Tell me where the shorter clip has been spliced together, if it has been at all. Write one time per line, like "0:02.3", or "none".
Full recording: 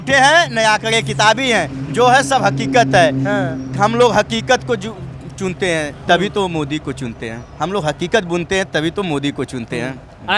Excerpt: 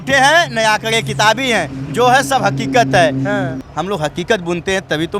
0:03.6